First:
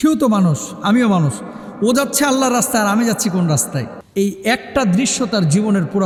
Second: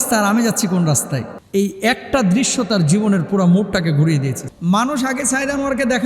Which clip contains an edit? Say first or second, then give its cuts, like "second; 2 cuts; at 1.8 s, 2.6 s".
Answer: second; 1 cut; at 4.5 s